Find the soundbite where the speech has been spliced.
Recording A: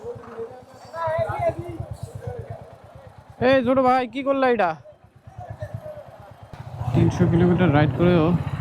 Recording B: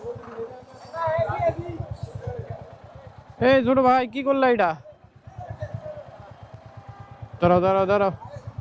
A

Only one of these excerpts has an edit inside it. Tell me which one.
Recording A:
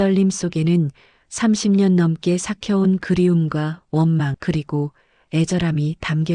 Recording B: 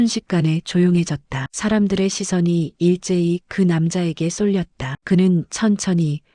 B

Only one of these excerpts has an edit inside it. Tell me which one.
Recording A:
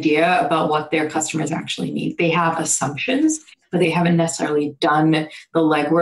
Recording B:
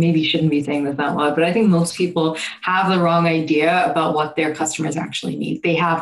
A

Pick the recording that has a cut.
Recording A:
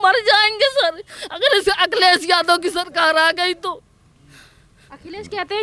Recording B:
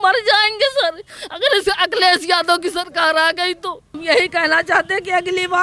B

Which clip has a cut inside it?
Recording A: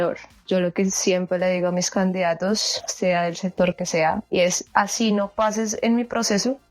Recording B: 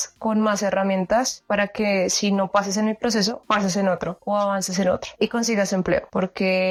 A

